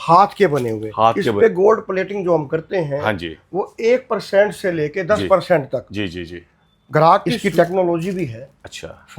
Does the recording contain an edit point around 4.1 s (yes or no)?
no